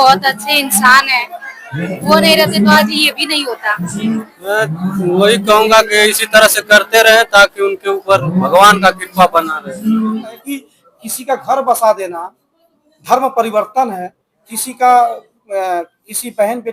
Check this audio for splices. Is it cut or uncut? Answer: cut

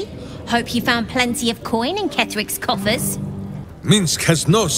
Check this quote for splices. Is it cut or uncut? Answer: cut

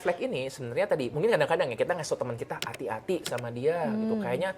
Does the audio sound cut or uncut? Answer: cut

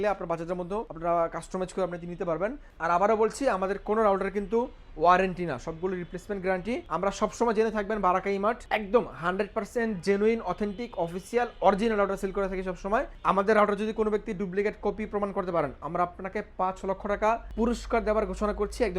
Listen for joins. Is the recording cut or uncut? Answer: cut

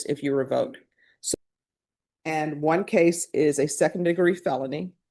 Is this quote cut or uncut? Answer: cut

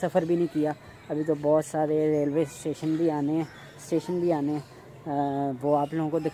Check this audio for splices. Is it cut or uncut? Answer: uncut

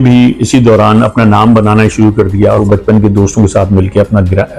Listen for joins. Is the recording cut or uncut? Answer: cut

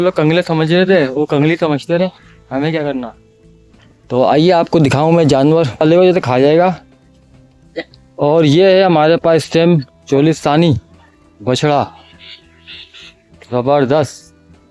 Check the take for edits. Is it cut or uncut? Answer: cut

